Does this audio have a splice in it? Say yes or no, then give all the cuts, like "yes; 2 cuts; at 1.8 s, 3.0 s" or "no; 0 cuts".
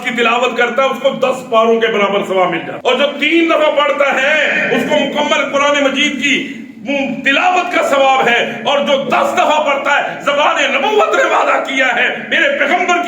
yes; 1 cut; at 2.7 s